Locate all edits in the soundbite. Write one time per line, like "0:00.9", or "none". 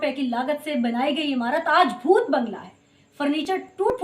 none